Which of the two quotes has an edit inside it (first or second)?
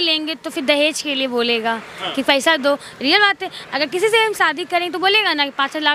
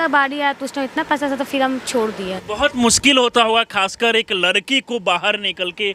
second